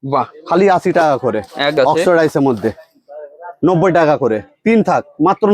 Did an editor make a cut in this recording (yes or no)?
yes